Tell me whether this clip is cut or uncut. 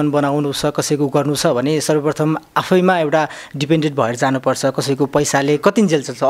uncut